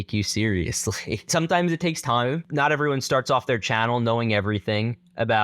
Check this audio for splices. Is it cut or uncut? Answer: cut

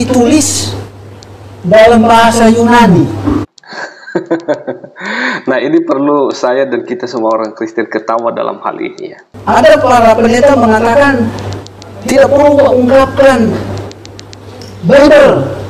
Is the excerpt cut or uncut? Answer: cut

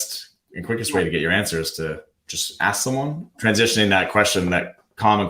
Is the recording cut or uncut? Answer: cut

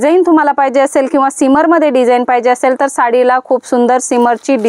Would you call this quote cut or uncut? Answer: uncut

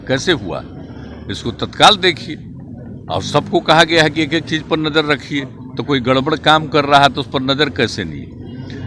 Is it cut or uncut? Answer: uncut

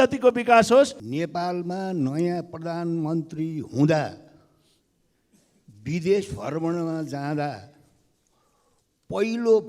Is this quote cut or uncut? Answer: cut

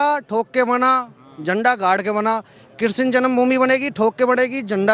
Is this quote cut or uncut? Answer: uncut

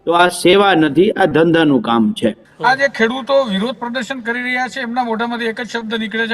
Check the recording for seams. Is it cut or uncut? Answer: cut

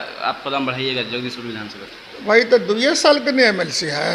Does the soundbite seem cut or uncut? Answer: uncut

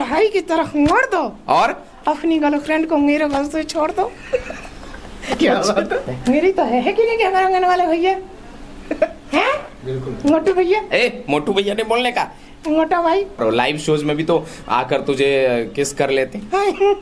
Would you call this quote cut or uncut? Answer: cut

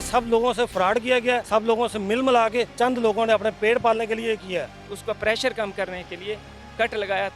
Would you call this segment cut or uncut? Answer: cut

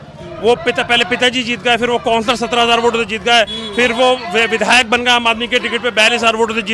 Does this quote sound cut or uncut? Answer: uncut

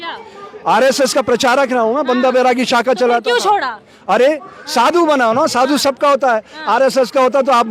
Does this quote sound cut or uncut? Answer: uncut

